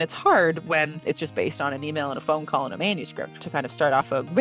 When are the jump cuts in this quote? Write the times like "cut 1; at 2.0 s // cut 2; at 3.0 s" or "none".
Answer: cut 1; at 1.0 s // cut 2; at 3.4 s